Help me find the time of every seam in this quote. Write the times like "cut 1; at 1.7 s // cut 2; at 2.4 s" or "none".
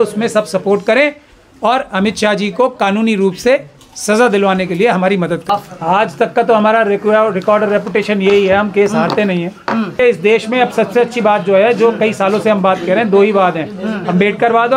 cut 1; at 5.5 s // cut 2; at 10.0 s